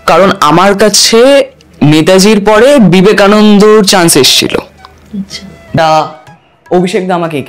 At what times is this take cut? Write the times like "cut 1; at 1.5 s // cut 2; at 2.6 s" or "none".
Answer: cut 1; at 5.7 s